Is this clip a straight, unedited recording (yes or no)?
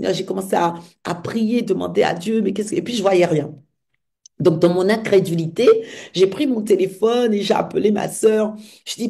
yes